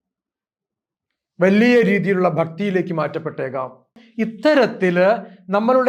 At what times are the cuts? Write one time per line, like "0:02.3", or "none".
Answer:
0:04.0